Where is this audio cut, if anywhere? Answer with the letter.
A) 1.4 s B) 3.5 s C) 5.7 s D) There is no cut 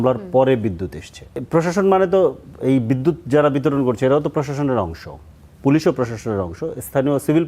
A